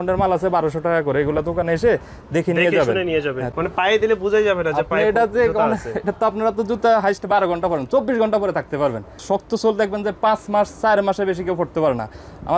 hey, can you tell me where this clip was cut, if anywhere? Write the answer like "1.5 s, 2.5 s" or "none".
3.5 s, 9.2 s